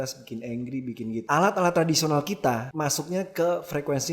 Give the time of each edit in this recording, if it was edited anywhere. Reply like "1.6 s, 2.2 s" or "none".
1.2 s, 2.7 s